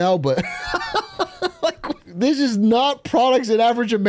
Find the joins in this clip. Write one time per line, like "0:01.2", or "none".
0:02.0